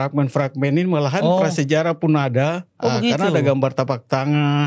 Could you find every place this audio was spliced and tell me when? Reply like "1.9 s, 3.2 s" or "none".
2.7 s